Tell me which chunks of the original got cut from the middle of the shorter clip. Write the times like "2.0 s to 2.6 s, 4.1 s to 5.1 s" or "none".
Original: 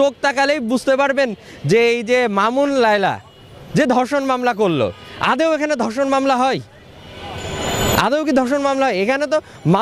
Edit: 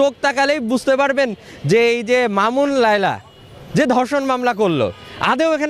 none